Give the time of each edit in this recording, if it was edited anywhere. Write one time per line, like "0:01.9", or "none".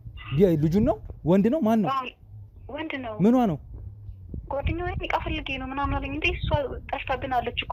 none